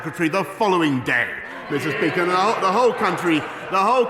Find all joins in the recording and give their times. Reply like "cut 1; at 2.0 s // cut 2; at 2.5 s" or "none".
none